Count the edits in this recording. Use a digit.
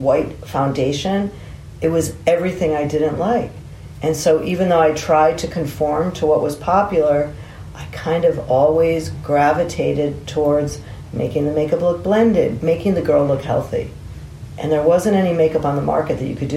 1